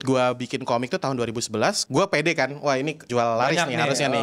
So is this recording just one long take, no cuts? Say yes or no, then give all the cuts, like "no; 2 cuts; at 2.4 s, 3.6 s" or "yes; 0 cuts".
no; 2 cuts; at 1.8 s, 3.0 s